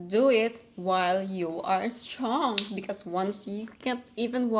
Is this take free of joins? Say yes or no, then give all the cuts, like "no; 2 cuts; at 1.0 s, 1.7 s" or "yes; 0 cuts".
yes; 0 cuts